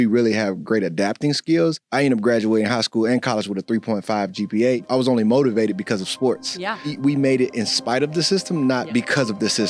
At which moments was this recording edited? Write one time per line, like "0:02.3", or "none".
0:01.8
0:04.8
0:06.9